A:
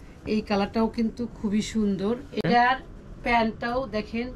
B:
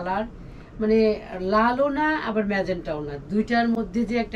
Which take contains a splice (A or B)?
A